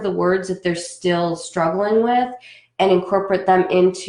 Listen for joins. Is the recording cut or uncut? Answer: uncut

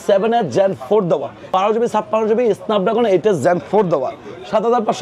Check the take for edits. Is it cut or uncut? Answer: cut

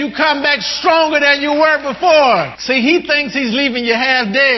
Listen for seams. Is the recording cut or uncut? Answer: cut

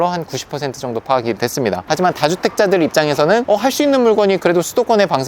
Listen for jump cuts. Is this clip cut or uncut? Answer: cut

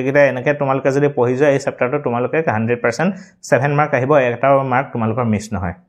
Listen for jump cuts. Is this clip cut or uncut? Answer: uncut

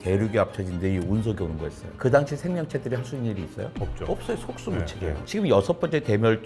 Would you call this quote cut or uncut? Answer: uncut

